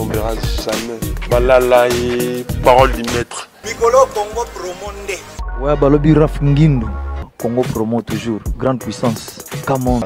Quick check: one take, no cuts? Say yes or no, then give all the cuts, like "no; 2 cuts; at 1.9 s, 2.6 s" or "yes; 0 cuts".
yes; 0 cuts